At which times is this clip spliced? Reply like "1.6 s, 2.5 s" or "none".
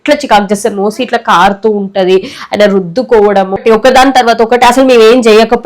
3.6 s